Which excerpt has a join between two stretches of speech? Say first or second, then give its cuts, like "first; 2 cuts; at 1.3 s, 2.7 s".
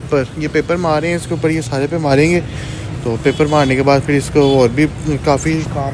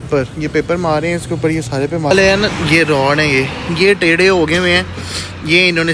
second; 1 cut; at 2.1 s